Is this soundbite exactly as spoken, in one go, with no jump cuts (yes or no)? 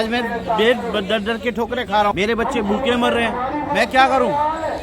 no